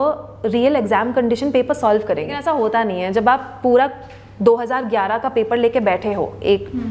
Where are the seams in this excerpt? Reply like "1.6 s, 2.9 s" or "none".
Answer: 2.4 s